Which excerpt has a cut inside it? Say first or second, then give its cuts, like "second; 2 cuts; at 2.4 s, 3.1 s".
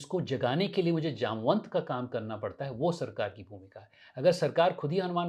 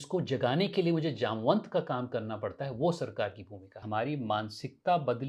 second; 1 cut; at 3.8 s